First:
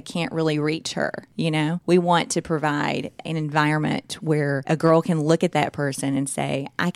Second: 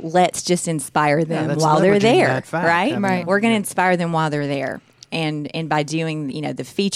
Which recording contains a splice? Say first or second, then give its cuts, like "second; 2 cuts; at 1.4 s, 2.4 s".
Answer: first; 3 cuts; at 1.6 s, 3.2 s, 4.6 s